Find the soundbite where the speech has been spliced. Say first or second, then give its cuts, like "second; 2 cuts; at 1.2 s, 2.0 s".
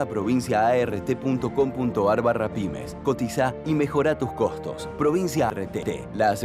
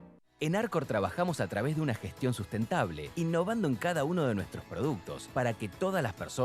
first; 1 cut; at 5.5 s